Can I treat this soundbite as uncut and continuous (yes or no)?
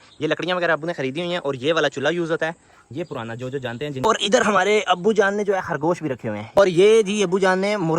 no